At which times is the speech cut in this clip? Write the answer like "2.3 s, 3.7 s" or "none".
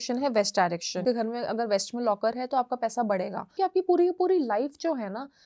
1.0 s, 3.5 s

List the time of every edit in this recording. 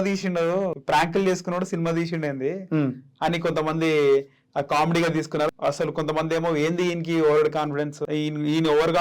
0.8 s, 5.5 s, 8.0 s

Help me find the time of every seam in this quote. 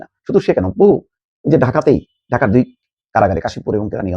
none

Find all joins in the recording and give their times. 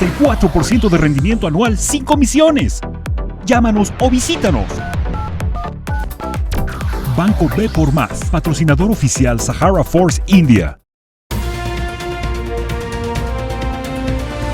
10.8 s

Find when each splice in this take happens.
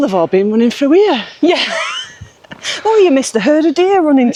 none

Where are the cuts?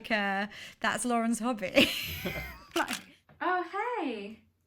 2.9 s

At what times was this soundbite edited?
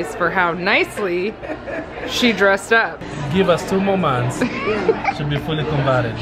3.1 s

